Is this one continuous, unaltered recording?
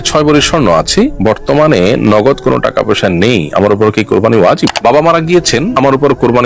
no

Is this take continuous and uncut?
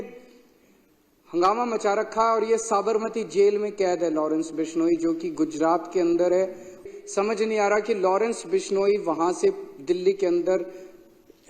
no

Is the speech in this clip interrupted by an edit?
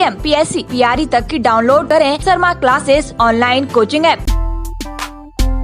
yes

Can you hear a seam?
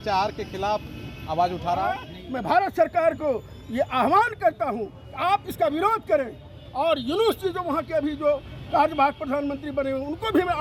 yes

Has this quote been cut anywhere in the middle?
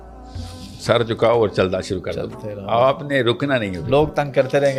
no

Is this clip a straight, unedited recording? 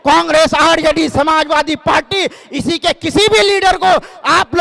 yes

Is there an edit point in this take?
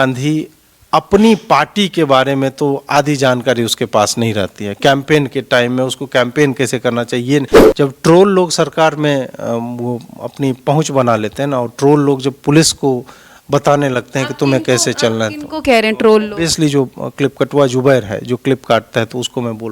yes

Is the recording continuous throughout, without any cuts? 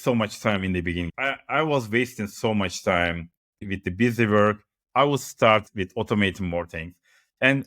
no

